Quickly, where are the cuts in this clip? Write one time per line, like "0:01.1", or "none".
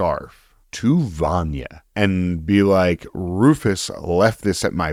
none